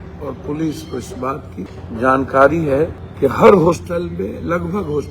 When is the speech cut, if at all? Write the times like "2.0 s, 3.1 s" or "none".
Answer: 1.7 s, 3.0 s